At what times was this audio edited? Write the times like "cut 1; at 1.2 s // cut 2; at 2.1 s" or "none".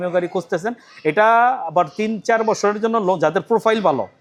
none